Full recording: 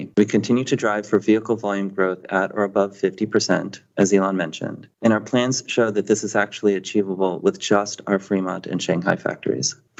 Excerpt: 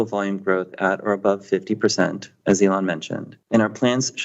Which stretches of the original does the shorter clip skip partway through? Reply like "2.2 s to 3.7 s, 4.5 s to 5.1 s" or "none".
none